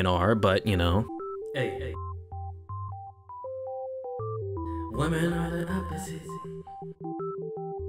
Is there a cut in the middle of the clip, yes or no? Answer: yes